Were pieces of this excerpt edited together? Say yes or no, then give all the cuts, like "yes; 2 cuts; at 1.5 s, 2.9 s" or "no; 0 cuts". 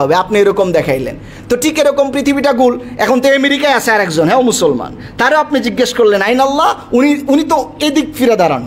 no; 0 cuts